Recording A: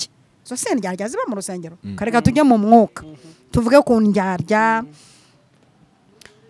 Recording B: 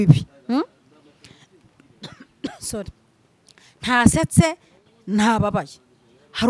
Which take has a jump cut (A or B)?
A